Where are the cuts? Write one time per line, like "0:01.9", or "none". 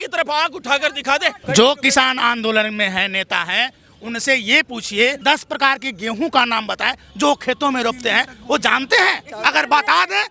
0:01.4
0:05.2
0:09.3

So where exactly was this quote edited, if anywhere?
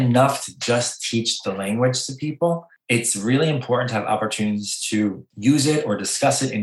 0:02.7
0:05.3

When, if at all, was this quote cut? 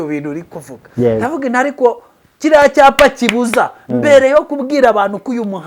none

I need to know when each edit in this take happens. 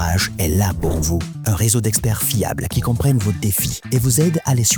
none

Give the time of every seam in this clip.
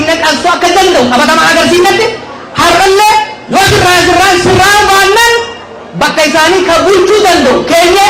none

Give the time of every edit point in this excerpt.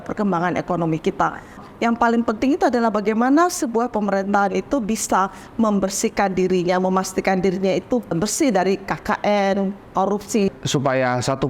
0:01.6
0:08.1
0:10.5

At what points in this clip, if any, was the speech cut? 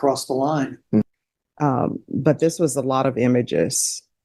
0:01.0

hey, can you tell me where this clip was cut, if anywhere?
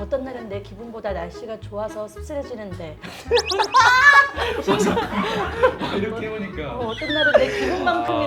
none

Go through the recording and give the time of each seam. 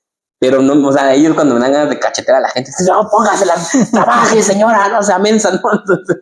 0:03.4

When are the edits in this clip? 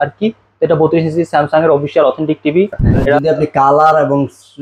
0:03.2

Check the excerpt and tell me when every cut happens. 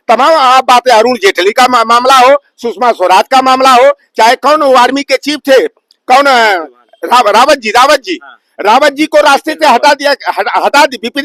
none

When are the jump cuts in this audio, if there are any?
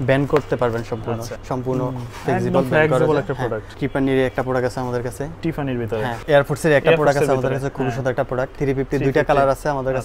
0:01.3
0:03.7
0:06.1
0:08.6

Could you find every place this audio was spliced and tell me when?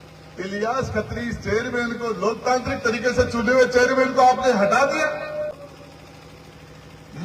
0:05.6

